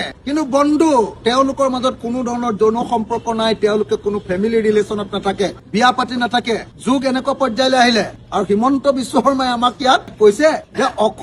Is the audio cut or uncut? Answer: uncut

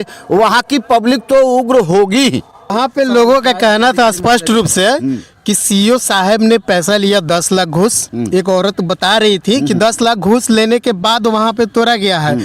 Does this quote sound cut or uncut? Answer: cut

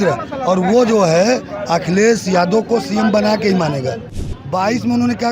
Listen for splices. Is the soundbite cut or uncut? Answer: cut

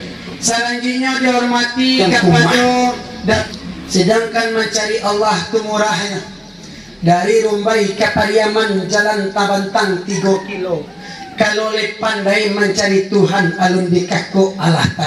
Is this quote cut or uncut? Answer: cut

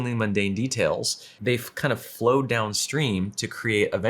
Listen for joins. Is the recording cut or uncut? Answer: cut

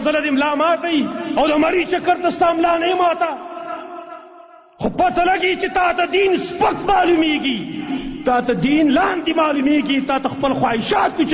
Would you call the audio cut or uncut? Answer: cut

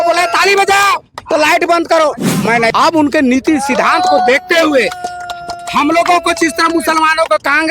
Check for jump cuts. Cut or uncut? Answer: cut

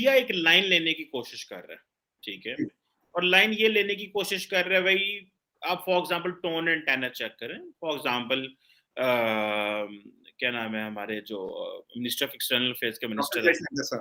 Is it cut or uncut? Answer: uncut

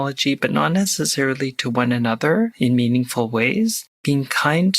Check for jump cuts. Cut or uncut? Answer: cut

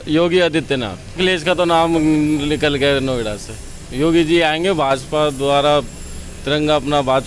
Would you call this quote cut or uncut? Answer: cut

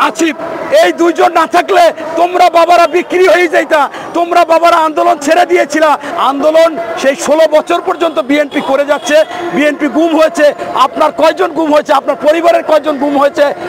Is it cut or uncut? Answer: cut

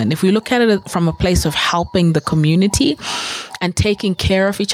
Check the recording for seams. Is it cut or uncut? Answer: uncut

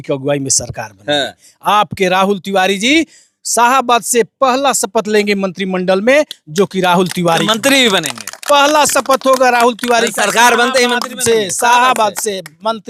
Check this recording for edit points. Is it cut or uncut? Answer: uncut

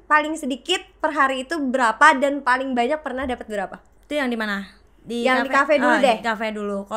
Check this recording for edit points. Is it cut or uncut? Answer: uncut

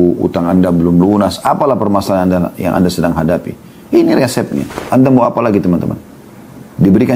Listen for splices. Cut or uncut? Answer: cut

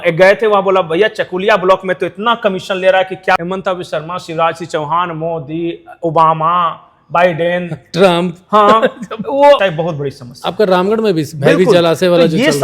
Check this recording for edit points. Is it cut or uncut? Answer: cut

